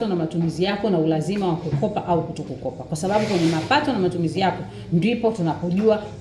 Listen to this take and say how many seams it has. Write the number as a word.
zero